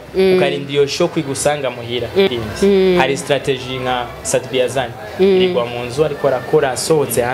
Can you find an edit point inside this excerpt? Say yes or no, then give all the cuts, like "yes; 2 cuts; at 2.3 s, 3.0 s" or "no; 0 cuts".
yes; 1 cut; at 2.3 s